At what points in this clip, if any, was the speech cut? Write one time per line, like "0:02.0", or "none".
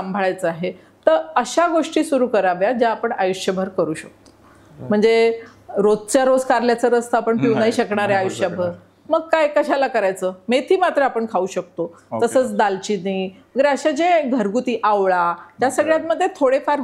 none